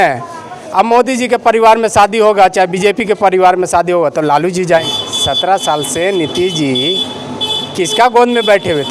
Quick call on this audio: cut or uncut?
cut